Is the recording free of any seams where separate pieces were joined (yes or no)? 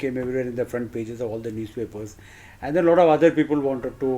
yes